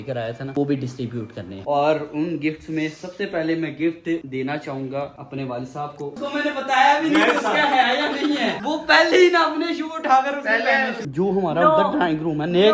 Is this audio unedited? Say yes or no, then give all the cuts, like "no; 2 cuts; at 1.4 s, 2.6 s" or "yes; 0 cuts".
no; 3 cuts; at 1.6 s, 6.2 s, 11.0 s